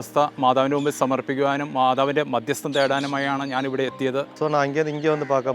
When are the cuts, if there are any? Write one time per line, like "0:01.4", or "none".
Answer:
0:04.3